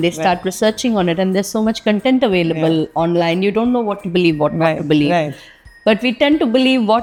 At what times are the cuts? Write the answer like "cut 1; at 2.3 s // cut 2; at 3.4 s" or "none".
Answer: none